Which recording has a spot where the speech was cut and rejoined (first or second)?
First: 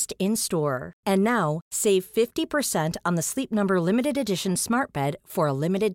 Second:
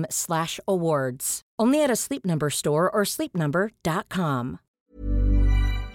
second